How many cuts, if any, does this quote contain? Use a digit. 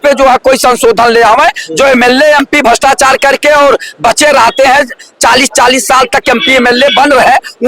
0